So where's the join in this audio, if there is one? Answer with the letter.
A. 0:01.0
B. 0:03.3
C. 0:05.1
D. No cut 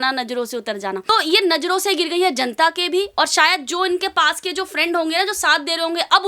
A